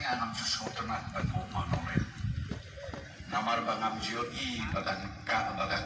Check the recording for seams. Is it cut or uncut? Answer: uncut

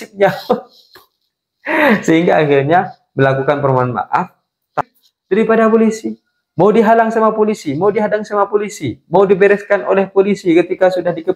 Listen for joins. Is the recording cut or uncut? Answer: cut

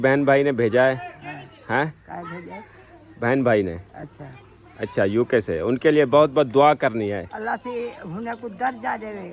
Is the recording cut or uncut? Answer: uncut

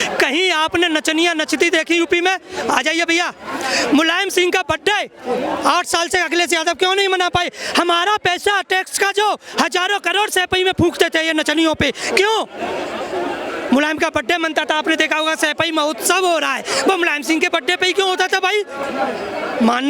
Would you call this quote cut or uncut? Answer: uncut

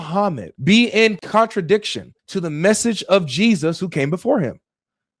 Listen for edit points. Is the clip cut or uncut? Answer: cut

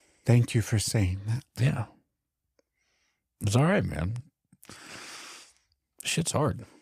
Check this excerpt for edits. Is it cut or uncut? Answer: uncut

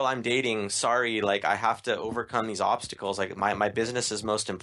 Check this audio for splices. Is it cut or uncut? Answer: uncut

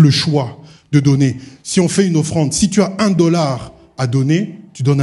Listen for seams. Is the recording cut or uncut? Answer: uncut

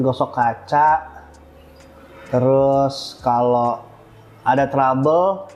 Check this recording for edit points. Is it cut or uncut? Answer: uncut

